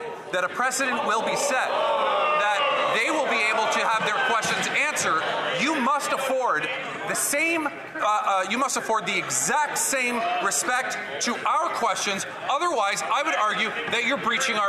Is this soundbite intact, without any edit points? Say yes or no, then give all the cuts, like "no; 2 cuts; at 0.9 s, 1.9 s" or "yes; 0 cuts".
yes; 0 cuts